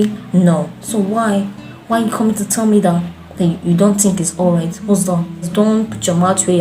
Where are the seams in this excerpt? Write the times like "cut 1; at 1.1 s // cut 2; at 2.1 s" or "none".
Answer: cut 1; at 5.5 s